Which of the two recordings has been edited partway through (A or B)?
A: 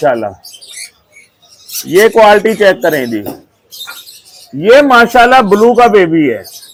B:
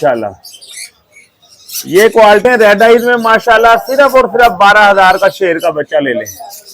B